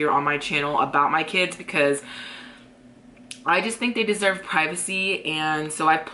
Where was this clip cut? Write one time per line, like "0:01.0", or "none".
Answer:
none